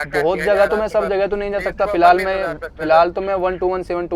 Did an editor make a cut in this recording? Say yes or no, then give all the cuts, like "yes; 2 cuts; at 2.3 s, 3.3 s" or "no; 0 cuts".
no; 0 cuts